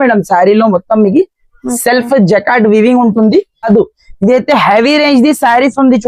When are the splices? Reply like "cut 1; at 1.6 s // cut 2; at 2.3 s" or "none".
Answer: cut 1; at 3.6 s